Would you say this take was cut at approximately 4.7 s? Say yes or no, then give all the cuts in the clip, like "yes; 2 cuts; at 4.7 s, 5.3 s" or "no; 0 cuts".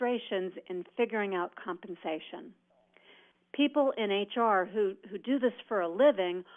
yes; 1 cut; at 4.7 s